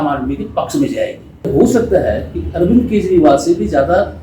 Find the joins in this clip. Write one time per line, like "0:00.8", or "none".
0:01.5